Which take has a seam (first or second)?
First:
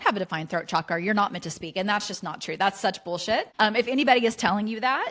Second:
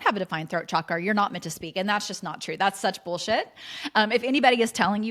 first